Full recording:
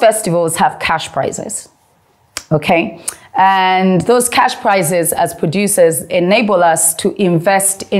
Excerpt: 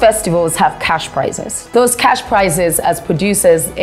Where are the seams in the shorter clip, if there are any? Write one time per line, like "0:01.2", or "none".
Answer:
0:01.7

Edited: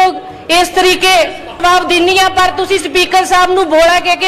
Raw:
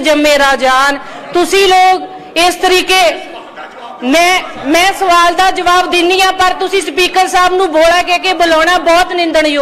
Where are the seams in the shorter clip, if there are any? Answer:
0:01.6

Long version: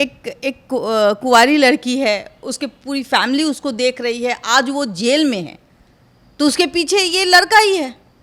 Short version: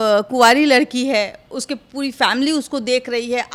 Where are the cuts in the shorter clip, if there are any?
none

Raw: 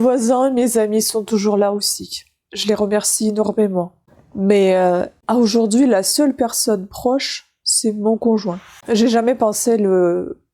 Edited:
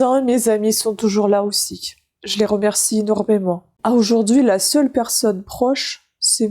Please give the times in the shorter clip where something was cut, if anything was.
0:03.7

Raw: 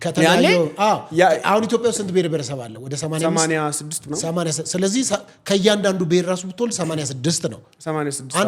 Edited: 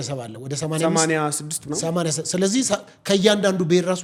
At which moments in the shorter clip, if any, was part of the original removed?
none

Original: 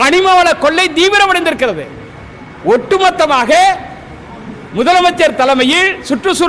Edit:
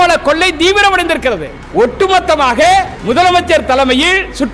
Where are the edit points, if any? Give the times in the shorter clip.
0:01.5
0:02.9

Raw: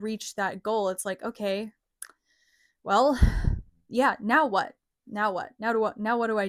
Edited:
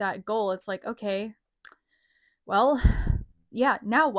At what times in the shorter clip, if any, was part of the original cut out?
none

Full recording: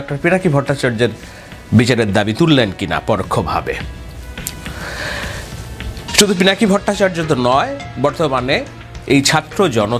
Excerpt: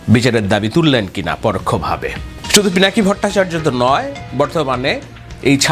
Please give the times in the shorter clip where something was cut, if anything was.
0:02.3

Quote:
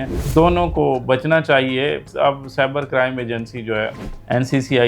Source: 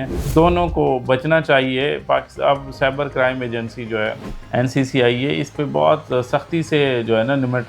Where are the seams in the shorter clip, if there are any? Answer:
0:02.0

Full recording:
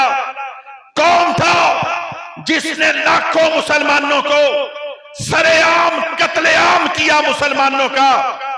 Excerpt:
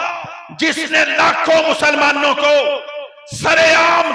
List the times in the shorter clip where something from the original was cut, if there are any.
none

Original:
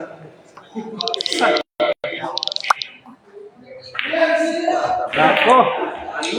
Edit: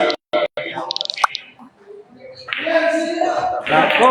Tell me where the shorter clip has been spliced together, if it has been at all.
none

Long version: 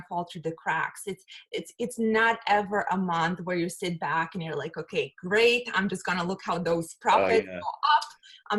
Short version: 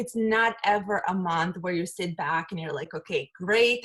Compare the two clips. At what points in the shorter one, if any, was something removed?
none

